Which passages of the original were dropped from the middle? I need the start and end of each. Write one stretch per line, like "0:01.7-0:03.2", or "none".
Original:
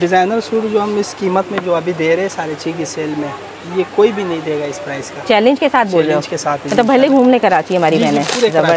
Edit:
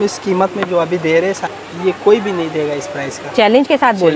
0:02.4-0:03.4